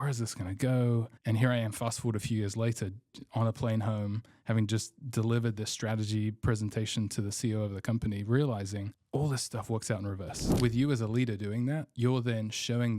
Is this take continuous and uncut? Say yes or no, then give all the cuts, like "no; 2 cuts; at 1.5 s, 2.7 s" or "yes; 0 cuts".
no; 3 cuts; at 1.1 s, 9.0 s, 10.4 s